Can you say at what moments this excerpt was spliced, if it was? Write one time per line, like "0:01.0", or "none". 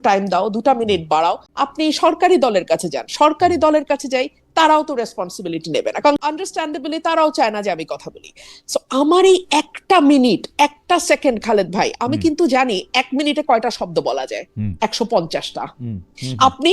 0:01.5
0:06.2